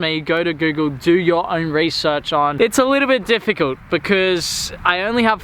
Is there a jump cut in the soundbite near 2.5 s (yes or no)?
yes